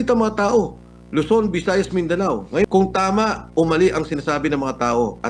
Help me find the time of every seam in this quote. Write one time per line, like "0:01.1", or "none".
0:02.7